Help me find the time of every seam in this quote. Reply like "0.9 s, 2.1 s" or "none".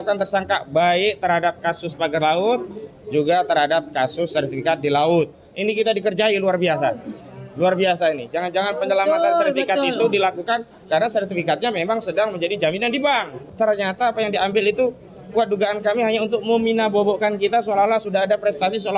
5.4 s, 13.4 s

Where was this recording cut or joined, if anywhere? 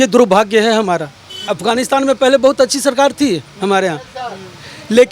1.5 s

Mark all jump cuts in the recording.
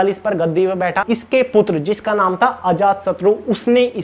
1.0 s

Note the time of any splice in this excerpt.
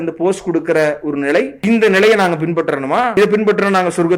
1.5 s, 3.1 s

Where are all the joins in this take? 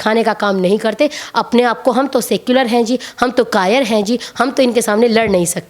none

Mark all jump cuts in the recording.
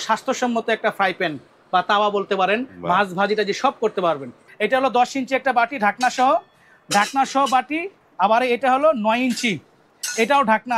4.4 s

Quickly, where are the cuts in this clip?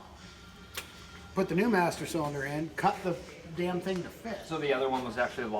none

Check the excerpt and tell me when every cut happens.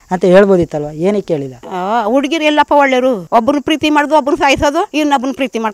1.6 s, 3.2 s, 4.9 s

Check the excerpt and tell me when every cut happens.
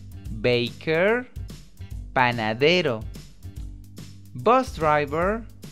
3.0 s, 4.3 s

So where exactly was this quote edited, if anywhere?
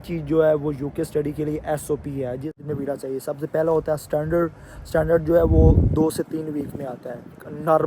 2.6 s

